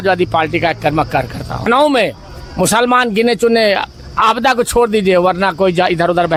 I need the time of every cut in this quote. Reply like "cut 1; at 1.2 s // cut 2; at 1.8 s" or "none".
none